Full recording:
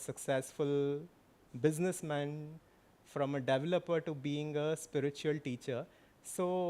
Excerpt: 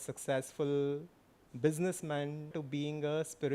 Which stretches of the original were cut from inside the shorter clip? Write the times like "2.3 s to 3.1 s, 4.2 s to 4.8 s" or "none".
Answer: 2.6 s to 4.1 s